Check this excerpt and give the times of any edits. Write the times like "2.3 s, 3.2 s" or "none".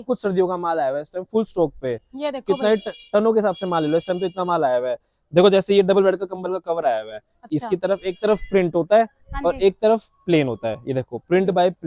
none